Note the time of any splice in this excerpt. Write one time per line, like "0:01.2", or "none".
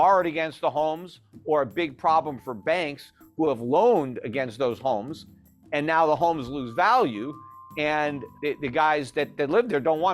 0:08.2